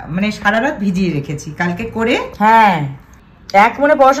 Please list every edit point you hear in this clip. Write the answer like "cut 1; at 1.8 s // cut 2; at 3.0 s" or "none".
none

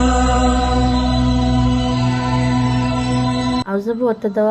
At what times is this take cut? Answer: cut 1; at 3.5 s

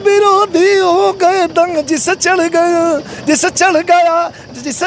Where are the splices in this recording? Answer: none

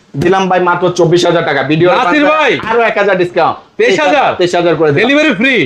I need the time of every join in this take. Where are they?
none

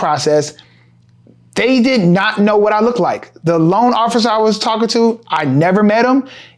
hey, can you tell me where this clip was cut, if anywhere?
none

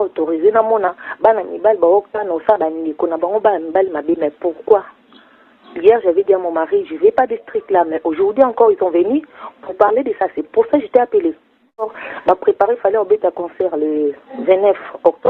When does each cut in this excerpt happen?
cut 1; at 11.9 s

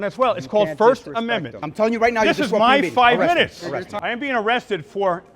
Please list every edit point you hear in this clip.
cut 1; at 1.6 s // cut 2; at 3.9 s

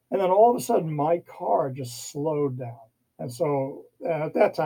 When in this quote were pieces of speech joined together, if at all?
none

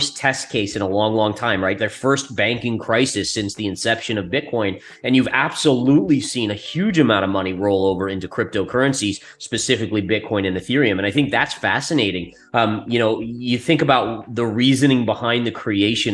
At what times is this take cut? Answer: none

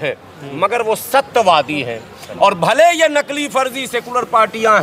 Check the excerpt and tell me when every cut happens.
none

